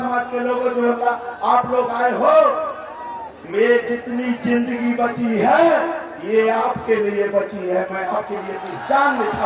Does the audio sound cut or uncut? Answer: uncut